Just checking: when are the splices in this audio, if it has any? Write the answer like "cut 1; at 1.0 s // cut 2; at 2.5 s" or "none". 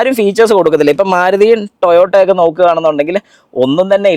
none